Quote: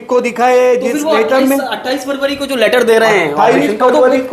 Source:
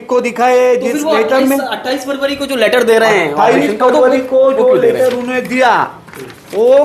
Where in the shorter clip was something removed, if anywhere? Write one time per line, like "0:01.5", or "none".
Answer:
none